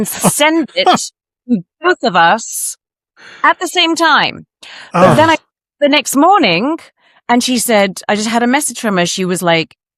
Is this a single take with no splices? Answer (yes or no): yes